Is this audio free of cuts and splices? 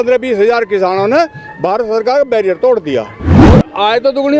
no; 1 cut; at 3.2 s

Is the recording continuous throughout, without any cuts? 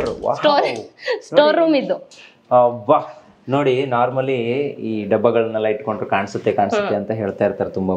yes; 0 cuts

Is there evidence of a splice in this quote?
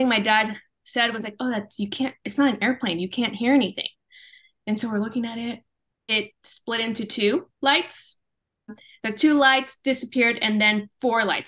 yes; 2 cuts; at 6.1 s, 8.9 s

